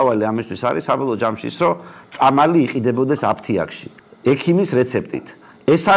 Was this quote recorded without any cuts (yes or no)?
yes